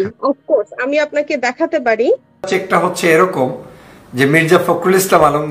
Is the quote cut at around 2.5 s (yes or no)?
yes